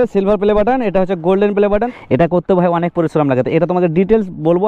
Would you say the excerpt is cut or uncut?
cut